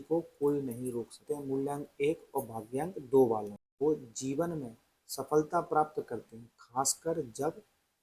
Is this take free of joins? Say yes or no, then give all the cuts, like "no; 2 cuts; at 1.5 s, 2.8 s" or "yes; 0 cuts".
no; 2 cuts; at 1.2 s, 3.6 s